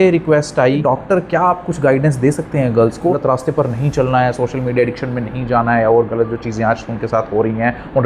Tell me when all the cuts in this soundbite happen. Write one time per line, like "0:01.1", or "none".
0:00.8
0:03.2